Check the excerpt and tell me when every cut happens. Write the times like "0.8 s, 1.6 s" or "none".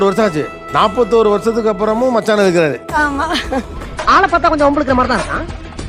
none